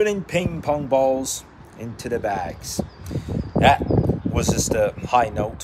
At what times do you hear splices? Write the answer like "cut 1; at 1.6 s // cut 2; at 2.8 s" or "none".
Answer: none